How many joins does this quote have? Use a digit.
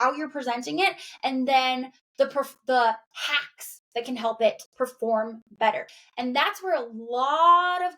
1